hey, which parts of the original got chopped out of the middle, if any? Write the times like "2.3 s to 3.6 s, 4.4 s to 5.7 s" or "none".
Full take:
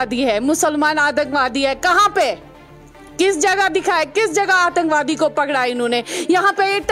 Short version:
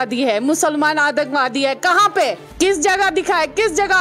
2.4 s to 3.0 s